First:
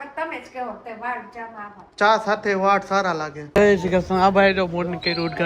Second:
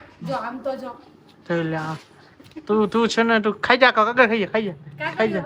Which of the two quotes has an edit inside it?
first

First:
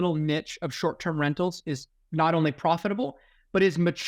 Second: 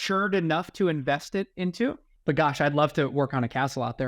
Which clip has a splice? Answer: second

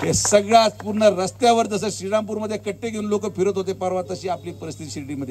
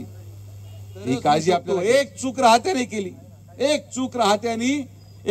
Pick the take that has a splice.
second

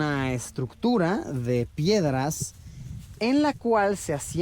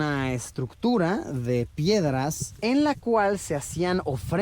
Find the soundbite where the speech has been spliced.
second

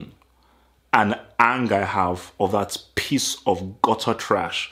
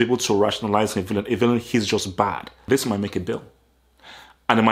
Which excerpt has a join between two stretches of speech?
second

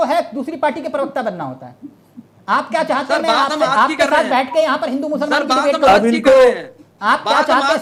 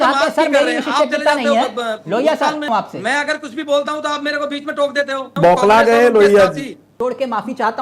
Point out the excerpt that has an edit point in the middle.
second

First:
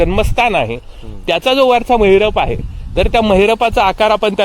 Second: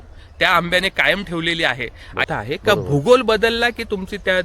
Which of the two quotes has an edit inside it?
second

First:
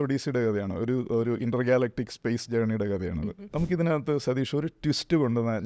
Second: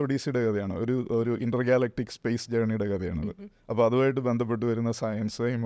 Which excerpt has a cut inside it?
first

